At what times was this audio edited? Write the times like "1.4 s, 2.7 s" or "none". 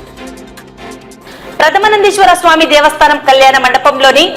1.0 s